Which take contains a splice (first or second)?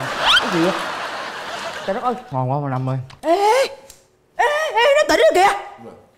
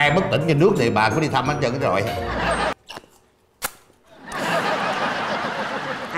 second